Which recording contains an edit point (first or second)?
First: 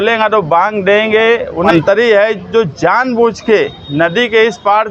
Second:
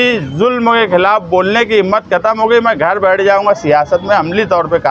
first